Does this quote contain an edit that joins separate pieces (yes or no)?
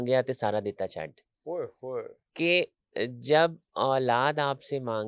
no